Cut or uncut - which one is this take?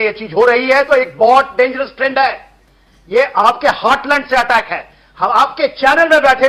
uncut